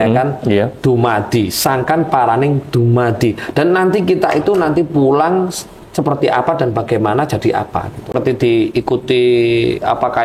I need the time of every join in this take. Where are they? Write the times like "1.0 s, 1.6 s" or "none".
8.1 s